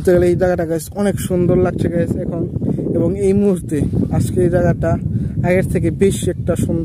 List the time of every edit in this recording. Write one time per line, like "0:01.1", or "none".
none